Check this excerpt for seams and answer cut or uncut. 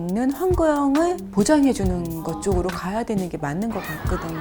uncut